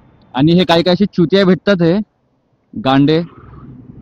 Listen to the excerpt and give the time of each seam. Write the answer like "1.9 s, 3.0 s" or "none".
none